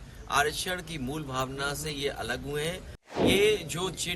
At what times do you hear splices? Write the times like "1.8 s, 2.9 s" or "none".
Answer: 3.2 s